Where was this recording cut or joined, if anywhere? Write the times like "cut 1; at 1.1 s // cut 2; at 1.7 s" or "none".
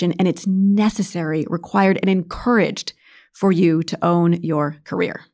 none